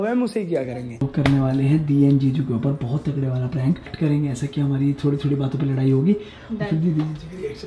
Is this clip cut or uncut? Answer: cut